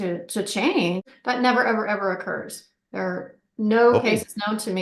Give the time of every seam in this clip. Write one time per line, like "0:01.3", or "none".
0:01.1